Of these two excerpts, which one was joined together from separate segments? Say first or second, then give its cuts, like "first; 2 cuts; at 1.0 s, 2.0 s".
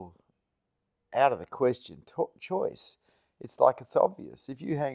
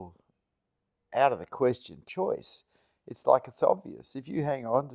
second; 1 cut; at 2.0 s